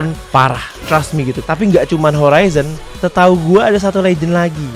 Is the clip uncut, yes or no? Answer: no